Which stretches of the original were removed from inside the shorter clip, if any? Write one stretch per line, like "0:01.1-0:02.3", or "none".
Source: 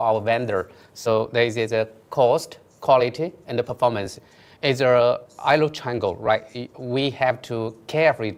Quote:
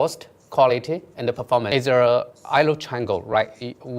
0:04.0-0:04.6